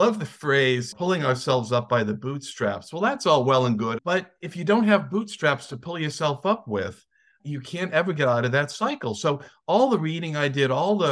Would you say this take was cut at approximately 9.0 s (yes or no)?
no